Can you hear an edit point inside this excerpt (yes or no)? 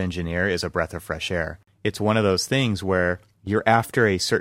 yes